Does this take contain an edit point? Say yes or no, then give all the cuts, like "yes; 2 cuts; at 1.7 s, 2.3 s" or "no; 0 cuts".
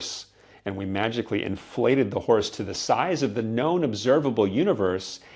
no; 0 cuts